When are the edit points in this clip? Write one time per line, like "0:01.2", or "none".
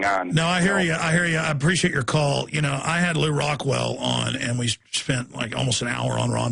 none